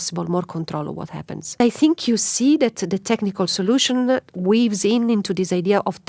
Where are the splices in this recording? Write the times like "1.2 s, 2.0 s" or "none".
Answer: 1.4 s